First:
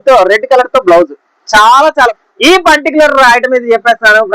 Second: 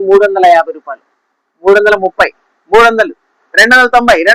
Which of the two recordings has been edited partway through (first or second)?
first